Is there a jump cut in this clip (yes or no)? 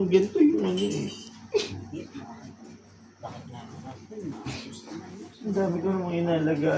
no